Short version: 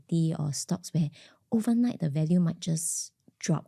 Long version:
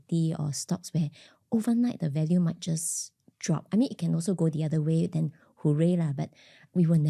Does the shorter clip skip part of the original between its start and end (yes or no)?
no